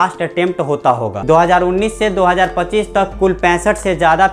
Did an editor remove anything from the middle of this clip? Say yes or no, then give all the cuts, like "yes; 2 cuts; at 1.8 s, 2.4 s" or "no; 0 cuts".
yes; 1 cut; at 1.1 s